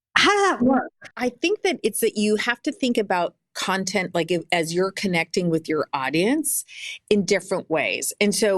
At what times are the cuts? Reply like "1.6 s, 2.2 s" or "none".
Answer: 1.1 s